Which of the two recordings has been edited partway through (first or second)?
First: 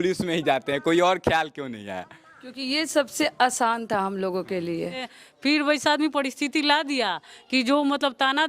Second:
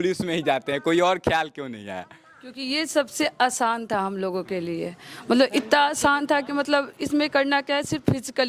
first